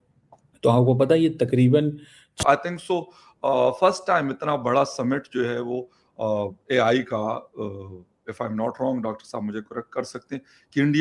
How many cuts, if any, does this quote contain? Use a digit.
1